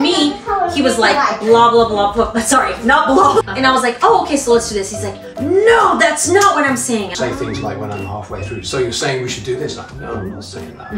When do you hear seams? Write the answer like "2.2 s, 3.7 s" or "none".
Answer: 3.4 s, 7.1 s

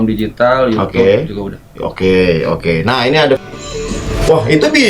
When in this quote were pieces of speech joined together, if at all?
3.4 s

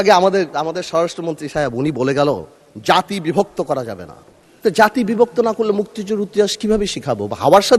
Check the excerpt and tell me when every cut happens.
none

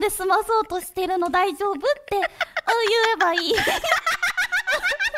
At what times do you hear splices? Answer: none

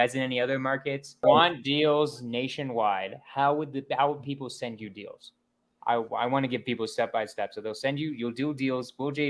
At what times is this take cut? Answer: 1.2 s

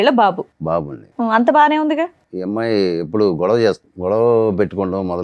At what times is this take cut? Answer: 2.3 s, 3.9 s

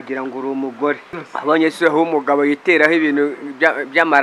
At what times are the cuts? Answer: 1.1 s

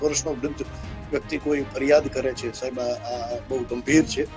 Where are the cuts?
none

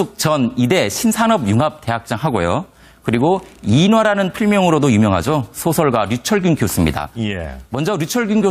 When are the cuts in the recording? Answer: none

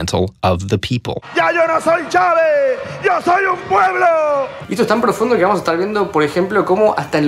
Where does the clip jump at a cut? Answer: 1.2 s, 4.6 s

